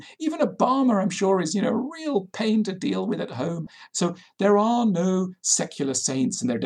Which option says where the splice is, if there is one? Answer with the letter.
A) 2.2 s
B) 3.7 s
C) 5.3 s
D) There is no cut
B